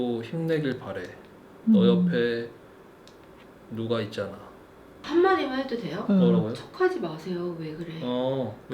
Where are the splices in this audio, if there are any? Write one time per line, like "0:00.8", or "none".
0:05.0